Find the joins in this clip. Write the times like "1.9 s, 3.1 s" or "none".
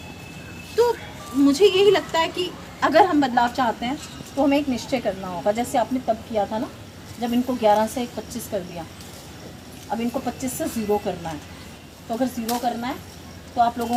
none